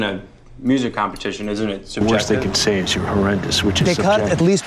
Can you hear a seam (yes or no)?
yes